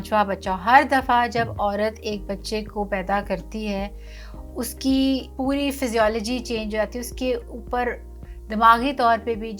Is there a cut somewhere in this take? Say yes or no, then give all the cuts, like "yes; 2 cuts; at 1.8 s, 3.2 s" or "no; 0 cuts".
no; 0 cuts